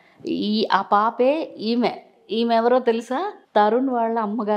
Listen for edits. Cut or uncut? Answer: cut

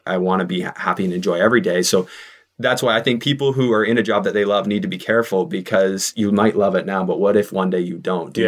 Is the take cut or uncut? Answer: uncut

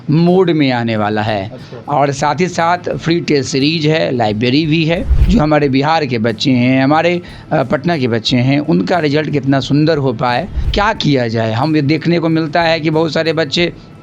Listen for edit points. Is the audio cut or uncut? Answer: cut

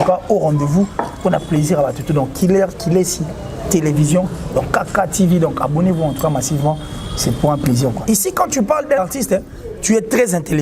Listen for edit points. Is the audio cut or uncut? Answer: cut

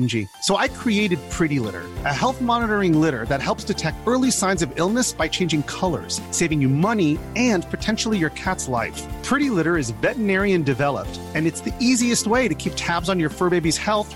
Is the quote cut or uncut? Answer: uncut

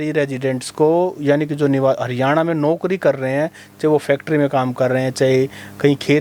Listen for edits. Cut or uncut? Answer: uncut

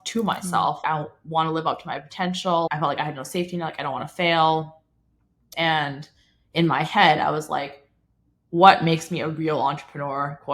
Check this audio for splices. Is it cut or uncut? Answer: cut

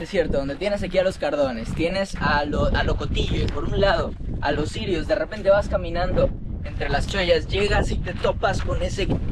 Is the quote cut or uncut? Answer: uncut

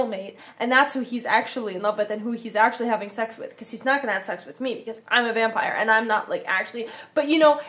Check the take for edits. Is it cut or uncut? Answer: uncut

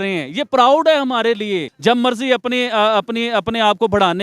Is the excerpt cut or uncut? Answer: cut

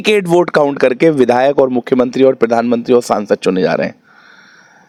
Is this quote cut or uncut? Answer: uncut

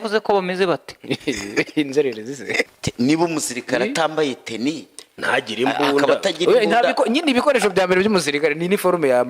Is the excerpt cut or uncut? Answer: cut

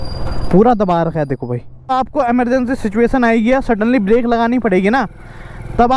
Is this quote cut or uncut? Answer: cut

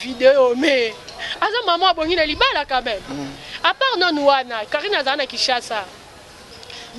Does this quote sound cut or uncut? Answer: uncut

